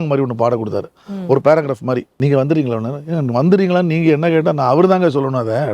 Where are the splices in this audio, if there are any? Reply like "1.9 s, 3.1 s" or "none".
2.1 s